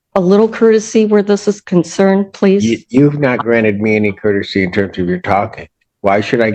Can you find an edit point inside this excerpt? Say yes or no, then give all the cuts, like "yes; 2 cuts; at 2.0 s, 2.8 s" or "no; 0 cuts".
no; 0 cuts